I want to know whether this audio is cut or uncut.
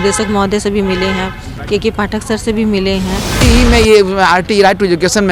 cut